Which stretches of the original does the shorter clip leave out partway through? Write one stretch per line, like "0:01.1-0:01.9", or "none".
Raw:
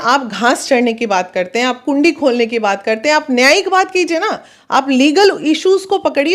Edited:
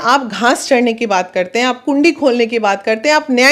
none